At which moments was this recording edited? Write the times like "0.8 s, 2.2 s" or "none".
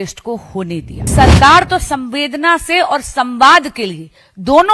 1.1 s